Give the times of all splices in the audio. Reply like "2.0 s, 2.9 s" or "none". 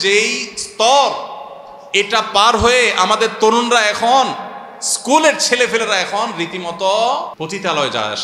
7.3 s